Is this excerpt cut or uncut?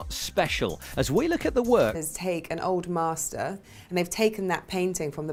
uncut